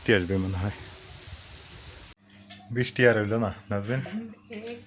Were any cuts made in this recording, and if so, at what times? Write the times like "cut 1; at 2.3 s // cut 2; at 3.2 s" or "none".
cut 1; at 2.1 s